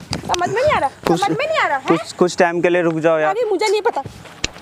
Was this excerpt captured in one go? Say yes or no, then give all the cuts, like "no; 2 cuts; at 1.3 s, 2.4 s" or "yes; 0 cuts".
no; 1 cut; at 3.2 s